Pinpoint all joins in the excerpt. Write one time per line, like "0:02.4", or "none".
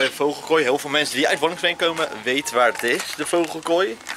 none